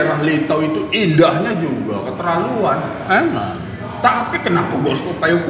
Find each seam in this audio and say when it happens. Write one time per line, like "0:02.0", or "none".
none